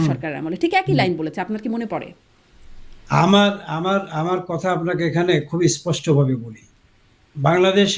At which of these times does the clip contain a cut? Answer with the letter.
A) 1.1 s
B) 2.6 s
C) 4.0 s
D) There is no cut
D